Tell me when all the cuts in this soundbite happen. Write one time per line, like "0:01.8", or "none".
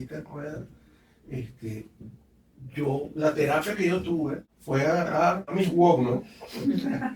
0:04.5
0:05.5